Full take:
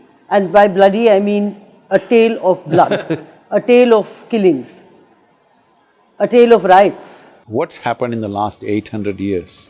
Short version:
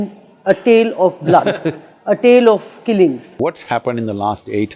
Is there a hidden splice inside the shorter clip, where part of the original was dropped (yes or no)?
yes